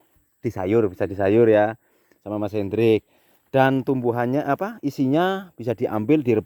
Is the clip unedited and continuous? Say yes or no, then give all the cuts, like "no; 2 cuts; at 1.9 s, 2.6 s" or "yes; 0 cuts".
yes; 0 cuts